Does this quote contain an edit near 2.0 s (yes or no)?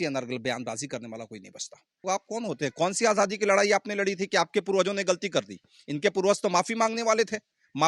yes